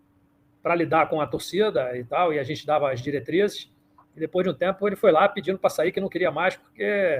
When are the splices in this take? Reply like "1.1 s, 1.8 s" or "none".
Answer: none

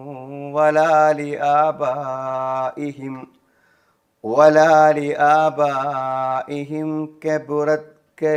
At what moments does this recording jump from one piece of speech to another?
none

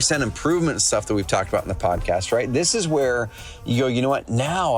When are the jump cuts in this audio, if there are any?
none

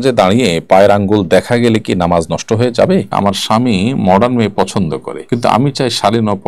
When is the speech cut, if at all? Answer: 3.1 s, 5.1 s

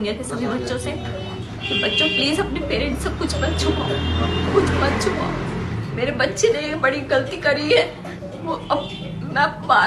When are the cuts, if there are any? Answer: none

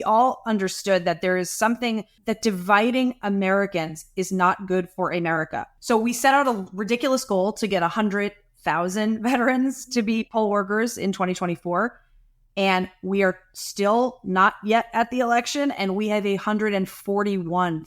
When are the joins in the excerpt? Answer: 2.1 s, 5.7 s

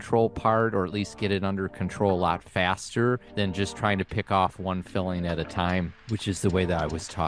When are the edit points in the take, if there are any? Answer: 3.3 s, 6.0 s

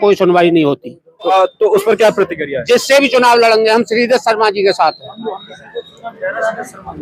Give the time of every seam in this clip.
1.3 s

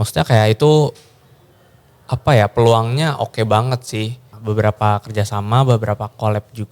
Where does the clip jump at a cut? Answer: 4.3 s

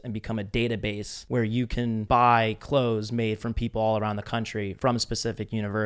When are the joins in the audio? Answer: 1.1 s, 2.0 s, 4.7 s

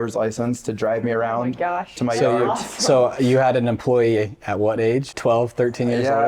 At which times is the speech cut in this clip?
5.1 s

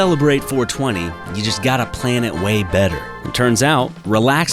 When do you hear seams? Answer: none

